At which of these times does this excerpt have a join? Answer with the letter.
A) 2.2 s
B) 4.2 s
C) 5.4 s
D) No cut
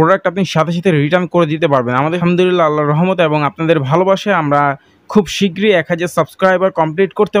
A